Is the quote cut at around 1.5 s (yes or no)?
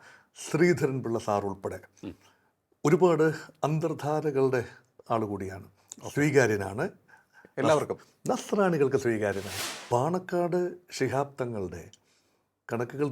no